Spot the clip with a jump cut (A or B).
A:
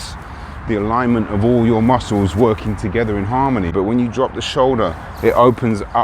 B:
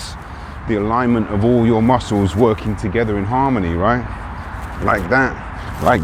A